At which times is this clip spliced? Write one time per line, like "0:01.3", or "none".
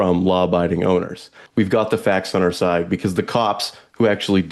0:01.3